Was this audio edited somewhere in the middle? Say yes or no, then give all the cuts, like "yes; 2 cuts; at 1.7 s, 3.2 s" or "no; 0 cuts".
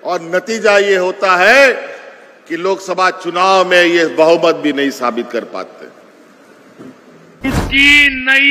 yes; 1 cut; at 7.5 s